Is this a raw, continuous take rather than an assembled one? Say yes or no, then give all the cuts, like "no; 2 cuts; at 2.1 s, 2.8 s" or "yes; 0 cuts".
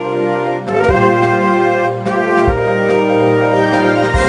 no; 1 cut; at 0.9 s